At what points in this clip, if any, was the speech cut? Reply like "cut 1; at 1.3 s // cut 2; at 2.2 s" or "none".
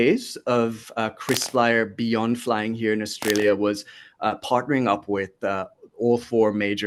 none